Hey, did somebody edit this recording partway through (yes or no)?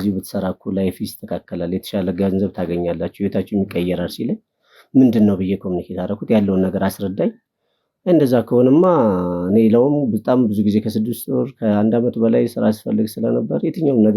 no